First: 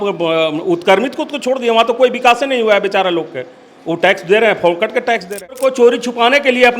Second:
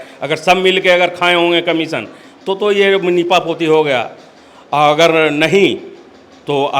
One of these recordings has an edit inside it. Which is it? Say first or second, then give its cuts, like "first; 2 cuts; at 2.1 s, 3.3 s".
first; 1 cut; at 5.6 s